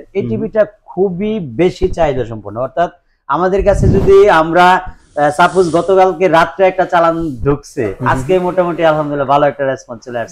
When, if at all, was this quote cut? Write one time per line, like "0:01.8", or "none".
none